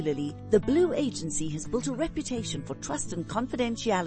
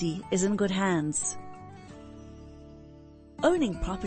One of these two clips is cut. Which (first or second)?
second